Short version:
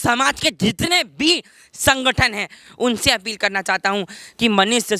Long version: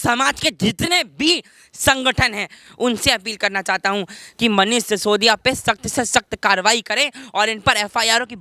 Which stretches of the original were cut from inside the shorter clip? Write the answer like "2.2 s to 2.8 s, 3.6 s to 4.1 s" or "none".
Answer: none